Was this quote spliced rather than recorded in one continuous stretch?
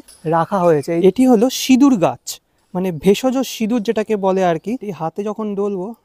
yes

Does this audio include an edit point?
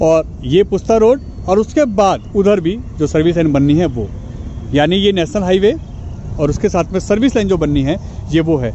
no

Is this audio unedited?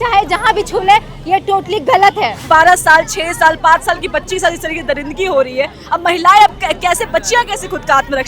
no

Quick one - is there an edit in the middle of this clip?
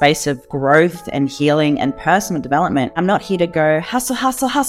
yes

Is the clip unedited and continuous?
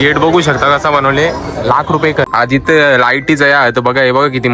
no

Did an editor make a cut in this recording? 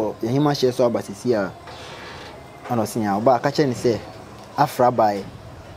no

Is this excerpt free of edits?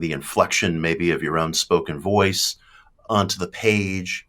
no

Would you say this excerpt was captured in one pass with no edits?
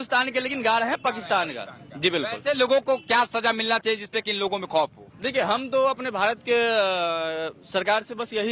yes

